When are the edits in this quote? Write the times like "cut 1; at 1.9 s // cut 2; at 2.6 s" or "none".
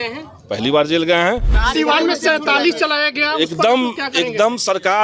cut 1; at 1.6 s